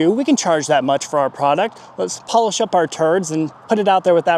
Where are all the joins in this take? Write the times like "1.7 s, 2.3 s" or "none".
none